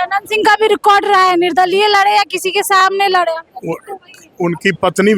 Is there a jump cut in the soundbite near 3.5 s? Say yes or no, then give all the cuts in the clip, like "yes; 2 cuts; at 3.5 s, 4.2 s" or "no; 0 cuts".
no; 0 cuts